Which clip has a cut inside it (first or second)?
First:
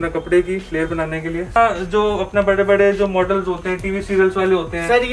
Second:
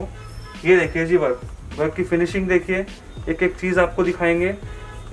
first